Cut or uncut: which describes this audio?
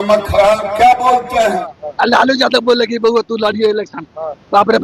cut